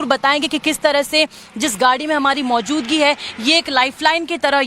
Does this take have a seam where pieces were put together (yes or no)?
yes